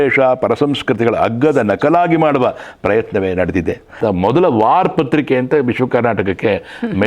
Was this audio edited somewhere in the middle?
yes; 1 cut; at 4.0 s

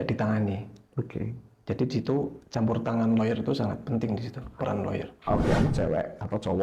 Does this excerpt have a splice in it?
yes; 1 cut; at 5.5 s

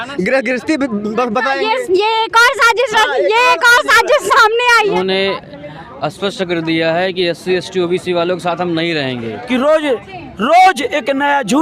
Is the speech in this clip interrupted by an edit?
yes; 2 cuts; at 4.8 s, 9.4 s

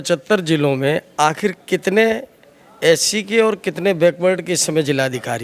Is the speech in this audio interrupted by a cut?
no; 0 cuts

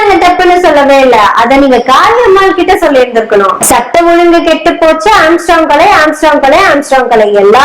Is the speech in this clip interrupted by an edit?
yes; 1 cut; at 3.6 s

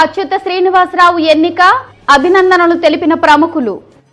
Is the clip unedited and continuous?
yes; 0 cuts

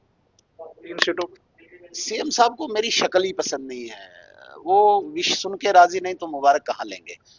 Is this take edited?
no; 0 cuts

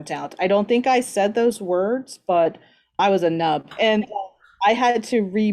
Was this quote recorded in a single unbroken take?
no; 2 cuts; at 3.0 s, 3.7 s

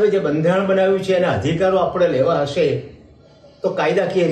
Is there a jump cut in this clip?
no; 0 cuts

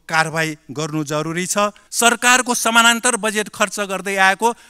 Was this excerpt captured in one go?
no; 1 cut; at 1.8 s

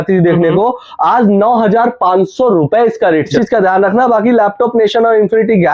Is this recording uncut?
no; 1 cut; at 3.3 s

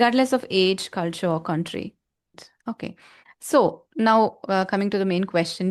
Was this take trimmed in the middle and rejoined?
yes; 1 cut; at 2.5 s

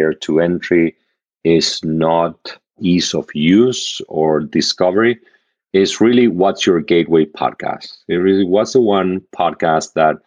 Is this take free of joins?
no; 1 cut; at 2.8 s

